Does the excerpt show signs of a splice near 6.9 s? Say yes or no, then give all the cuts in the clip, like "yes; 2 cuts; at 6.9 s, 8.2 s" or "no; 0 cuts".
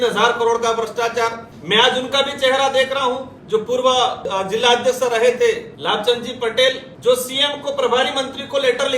yes; 5 cuts; at 1.5 s, 3.3 s, 4.2 s, 5.7 s, 6.9 s